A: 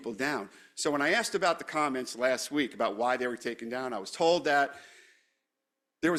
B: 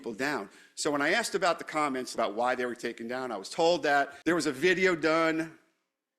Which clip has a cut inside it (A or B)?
B